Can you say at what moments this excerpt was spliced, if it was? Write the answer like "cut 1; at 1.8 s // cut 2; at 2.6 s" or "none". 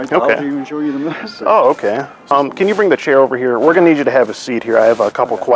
cut 1; at 2.3 s